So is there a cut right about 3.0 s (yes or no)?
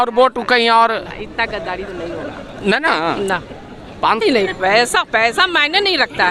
no